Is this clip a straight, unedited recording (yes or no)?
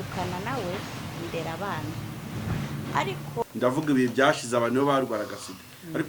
no